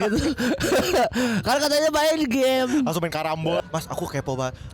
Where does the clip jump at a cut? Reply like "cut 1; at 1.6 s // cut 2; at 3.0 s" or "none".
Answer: cut 1; at 3.6 s

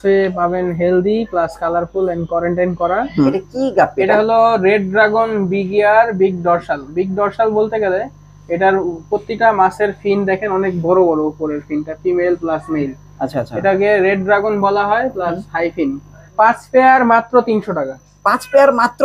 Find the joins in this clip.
cut 1; at 3.3 s // cut 2; at 16.2 s

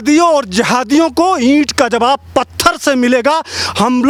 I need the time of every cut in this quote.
none

